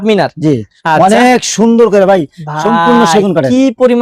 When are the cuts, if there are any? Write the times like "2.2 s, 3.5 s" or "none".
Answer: none

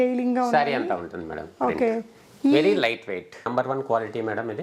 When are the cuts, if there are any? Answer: 3.5 s

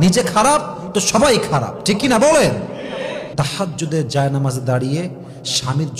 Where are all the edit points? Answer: 3.3 s

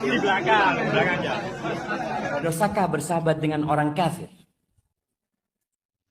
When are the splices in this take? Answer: 2.4 s

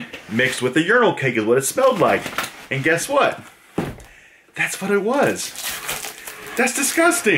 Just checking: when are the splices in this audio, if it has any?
none

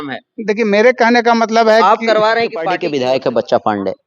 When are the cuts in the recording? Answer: 2.8 s

